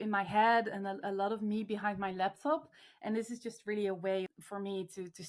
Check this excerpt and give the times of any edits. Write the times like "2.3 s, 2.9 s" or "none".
4.3 s